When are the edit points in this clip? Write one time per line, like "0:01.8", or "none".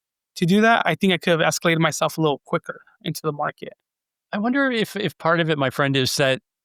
none